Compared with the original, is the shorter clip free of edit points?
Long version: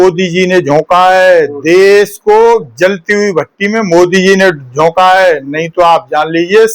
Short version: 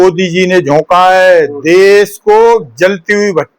yes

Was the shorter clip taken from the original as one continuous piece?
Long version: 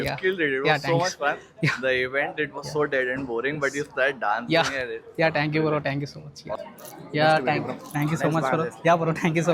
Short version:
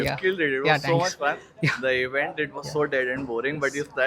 yes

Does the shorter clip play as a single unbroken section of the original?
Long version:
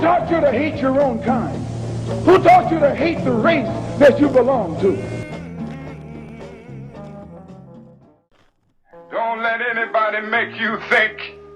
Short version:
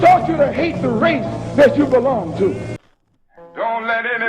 no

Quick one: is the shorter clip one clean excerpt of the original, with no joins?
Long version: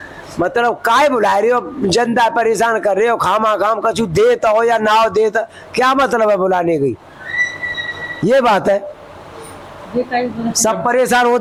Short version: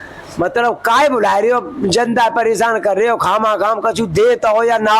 yes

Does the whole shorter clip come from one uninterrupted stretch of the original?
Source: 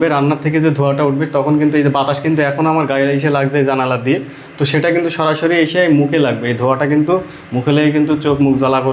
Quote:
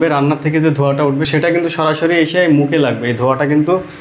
no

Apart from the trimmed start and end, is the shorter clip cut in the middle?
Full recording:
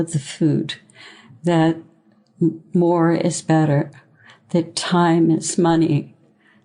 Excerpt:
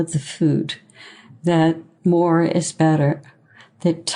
yes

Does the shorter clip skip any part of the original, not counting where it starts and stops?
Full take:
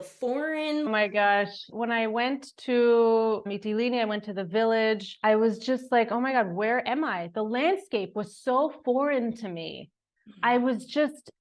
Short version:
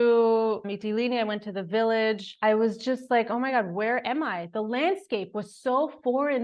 no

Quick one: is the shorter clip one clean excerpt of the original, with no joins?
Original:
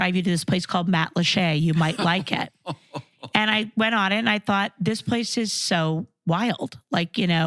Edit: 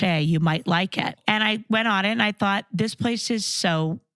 no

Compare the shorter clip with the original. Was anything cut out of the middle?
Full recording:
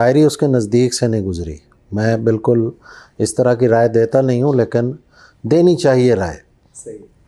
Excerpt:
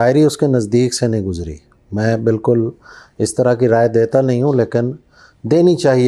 no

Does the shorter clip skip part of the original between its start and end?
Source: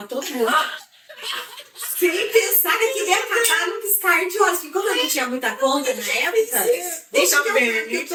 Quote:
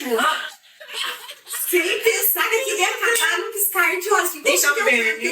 yes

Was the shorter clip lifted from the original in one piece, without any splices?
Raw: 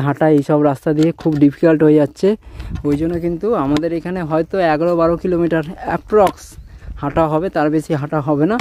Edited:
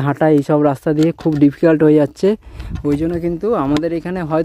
yes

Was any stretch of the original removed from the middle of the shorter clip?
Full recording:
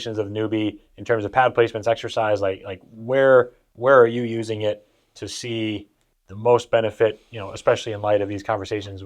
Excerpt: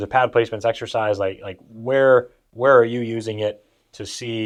no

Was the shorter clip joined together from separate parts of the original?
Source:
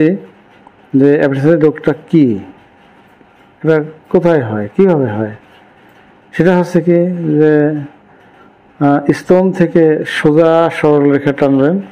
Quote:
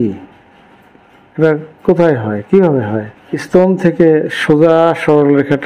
yes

